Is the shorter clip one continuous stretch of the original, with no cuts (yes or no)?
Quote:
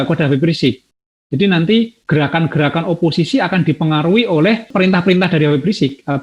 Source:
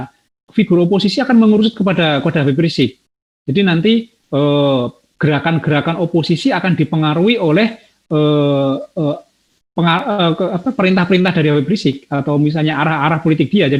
no